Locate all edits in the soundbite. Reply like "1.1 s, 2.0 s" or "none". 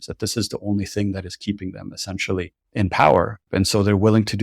2.6 s, 3.4 s